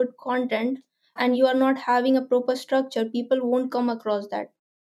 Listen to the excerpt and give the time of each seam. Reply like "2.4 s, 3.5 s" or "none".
1.4 s